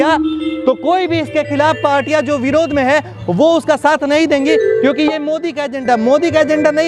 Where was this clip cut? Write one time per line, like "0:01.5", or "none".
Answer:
none

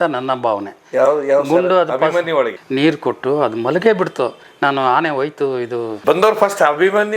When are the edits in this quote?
0:02.6
0:05.9

